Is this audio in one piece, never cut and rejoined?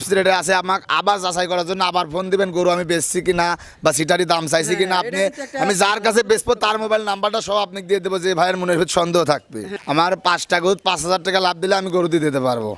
no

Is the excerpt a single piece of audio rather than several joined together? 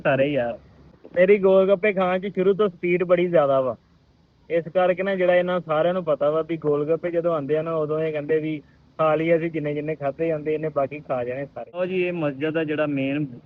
no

